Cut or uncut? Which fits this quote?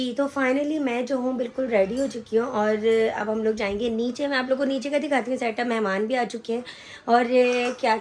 uncut